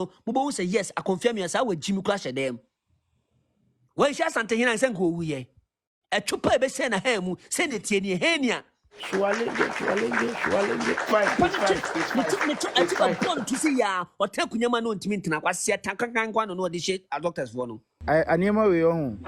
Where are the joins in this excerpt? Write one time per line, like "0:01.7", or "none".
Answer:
0:17.9